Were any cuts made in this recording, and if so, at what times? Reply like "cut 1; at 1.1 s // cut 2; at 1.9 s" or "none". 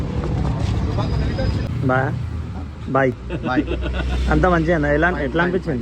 cut 1; at 1.7 s

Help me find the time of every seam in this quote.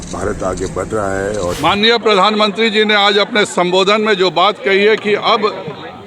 cut 1; at 1.6 s

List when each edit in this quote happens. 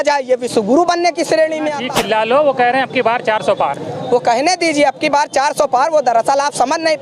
cut 1; at 1.8 s

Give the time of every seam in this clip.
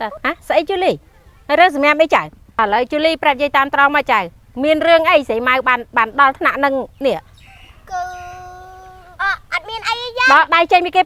none

